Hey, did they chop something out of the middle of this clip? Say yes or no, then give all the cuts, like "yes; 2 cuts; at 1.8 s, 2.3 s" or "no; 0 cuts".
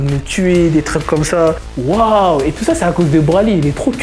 yes; 1 cut; at 1.7 s